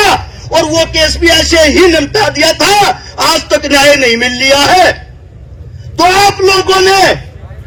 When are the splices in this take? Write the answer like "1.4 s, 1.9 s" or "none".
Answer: none